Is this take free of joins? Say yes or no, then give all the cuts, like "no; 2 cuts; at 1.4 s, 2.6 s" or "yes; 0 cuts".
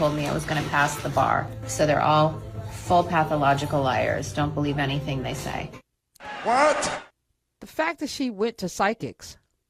yes; 0 cuts